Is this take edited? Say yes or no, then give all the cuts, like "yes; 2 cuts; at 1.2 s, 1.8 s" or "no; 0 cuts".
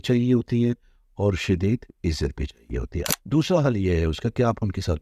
yes; 1 cut; at 3.1 s